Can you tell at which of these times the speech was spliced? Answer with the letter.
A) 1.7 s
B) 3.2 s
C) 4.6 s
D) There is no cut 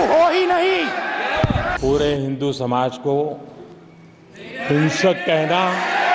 A